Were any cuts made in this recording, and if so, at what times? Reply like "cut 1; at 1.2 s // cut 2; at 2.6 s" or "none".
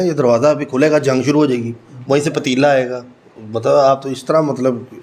none